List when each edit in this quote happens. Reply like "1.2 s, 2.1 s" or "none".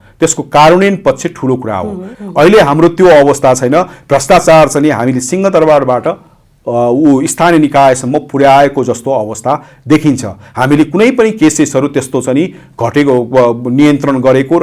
2.0 s